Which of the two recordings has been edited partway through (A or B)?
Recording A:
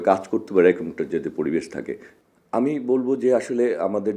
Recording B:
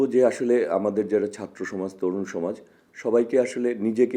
A